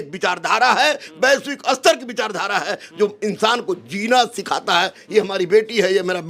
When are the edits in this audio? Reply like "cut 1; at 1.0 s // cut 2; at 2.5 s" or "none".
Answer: none